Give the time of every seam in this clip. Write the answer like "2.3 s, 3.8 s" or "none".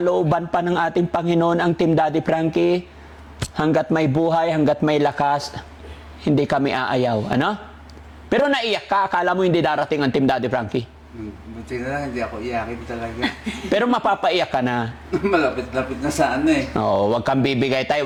none